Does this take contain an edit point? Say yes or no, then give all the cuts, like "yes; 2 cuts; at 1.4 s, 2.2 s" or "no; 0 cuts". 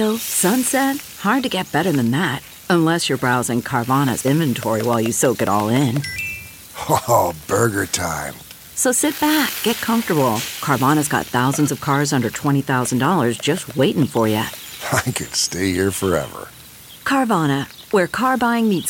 no; 0 cuts